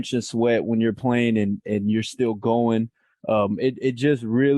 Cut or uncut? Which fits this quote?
uncut